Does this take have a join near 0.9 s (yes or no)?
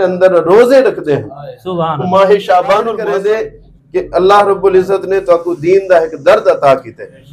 no